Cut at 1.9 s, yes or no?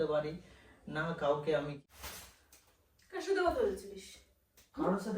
yes